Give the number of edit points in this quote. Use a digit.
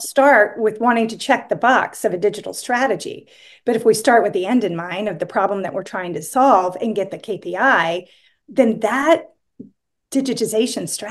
0